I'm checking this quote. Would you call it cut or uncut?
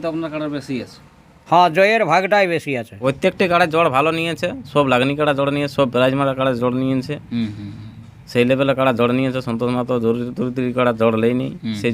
cut